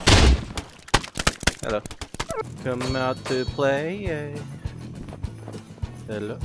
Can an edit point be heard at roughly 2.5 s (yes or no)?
yes